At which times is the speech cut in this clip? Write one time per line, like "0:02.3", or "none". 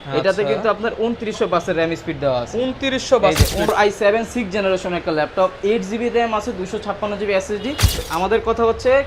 0:03.7
0:08.0